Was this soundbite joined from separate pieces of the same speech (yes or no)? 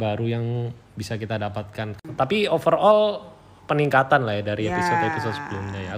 yes